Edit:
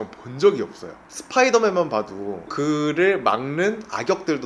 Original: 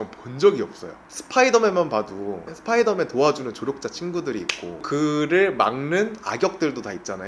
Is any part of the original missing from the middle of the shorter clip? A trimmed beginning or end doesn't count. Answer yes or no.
yes